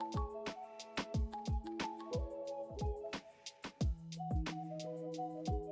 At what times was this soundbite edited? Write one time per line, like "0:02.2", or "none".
none